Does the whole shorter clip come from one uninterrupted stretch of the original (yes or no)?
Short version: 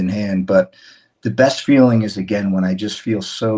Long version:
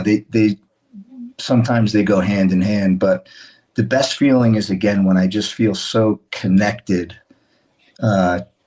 yes